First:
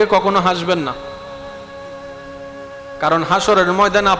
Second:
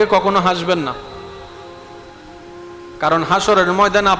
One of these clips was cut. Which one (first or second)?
first